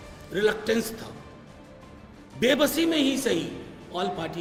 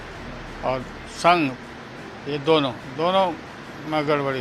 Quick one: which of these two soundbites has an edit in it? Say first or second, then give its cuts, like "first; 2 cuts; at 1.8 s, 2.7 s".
second; 1 cut; at 2.8 s